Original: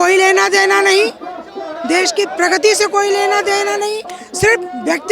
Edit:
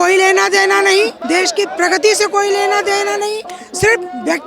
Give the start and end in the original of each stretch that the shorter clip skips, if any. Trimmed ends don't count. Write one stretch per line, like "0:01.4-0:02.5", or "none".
0:01.2-0:01.8